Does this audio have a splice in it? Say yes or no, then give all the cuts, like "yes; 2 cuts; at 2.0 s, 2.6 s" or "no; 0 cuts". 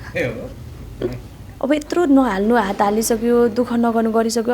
yes; 1 cut; at 1.5 s